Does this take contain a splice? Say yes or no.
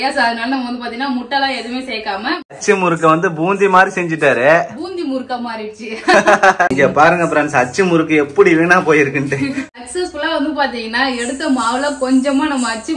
yes